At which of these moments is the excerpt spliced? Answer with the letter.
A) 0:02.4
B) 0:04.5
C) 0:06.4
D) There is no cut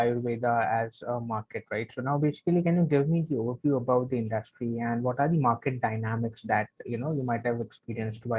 D